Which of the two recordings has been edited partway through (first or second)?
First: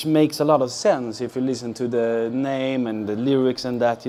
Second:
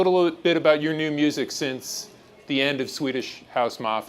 second